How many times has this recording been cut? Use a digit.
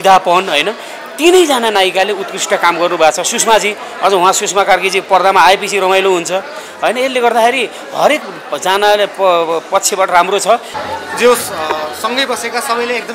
1